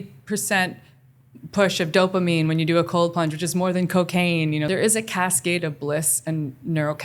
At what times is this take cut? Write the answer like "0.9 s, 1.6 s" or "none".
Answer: 4.6 s